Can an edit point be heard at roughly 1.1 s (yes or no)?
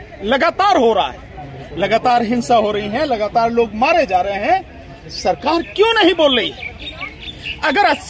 no